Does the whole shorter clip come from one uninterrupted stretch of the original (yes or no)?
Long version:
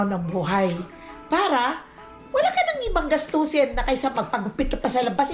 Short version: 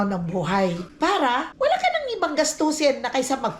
no